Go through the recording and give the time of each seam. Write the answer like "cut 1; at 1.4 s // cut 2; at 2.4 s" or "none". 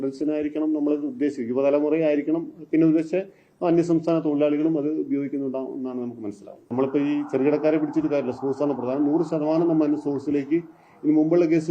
cut 1; at 6.7 s

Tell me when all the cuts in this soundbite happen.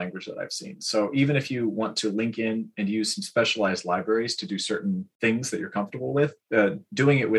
cut 1; at 5.1 s // cut 2; at 6.4 s

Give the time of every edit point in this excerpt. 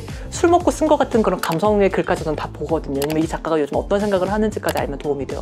none

